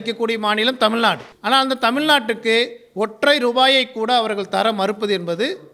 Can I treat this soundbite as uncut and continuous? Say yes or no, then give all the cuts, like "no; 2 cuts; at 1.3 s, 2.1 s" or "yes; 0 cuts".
no; 1 cut; at 1.3 s